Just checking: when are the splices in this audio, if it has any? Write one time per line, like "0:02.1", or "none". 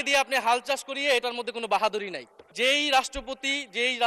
0:02.5